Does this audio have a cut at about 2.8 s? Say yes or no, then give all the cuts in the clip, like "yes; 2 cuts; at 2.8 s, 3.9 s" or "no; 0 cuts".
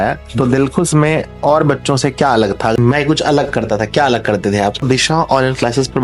yes; 2 cuts; at 2.8 s, 4.8 s